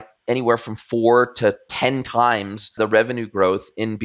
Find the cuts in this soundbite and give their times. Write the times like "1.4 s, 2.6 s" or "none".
2.7 s